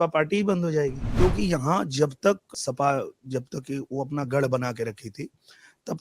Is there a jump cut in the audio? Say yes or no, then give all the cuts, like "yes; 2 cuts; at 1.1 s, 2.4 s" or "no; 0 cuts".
yes; 2 cuts; at 1.0 s, 2.5 s